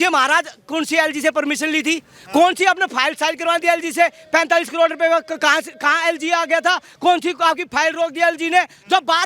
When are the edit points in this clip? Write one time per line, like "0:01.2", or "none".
none